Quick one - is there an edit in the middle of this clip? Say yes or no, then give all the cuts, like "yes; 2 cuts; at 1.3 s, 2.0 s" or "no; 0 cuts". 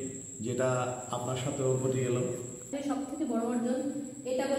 yes; 1 cut; at 2.7 s